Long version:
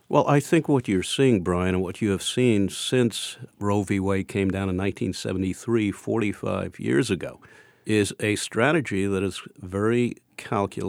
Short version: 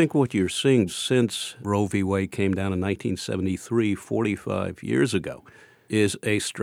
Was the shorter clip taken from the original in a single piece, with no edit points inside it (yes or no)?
no